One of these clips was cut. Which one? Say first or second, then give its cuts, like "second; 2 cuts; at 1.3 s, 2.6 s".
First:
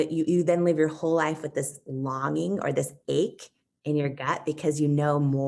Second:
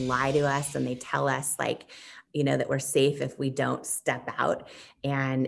first; 1 cut; at 1.8 s